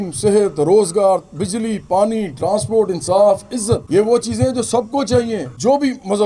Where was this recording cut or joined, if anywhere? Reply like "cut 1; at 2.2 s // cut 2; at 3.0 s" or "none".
none